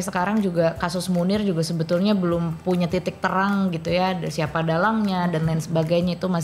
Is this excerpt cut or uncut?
uncut